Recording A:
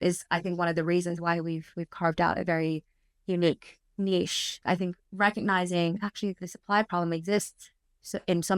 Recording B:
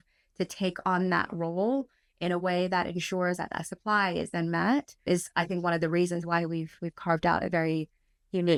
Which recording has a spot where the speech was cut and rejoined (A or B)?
A